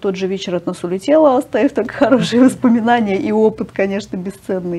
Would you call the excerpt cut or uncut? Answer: uncut